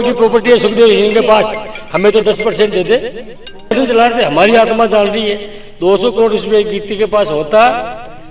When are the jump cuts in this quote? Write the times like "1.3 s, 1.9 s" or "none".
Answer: 3.7 s